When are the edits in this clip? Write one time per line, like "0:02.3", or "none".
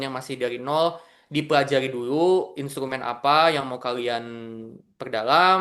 none